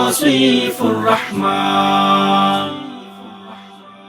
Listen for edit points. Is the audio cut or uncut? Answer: uncut